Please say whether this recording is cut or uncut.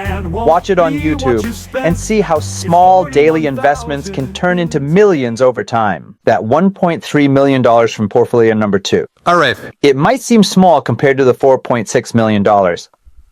cut